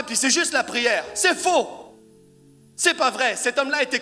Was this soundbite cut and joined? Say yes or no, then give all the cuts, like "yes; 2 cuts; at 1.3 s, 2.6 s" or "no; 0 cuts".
no; 0 cuts